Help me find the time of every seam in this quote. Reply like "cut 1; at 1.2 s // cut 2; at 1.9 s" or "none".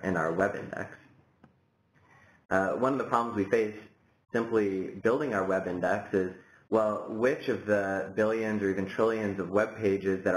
cut 1; at 2.0 s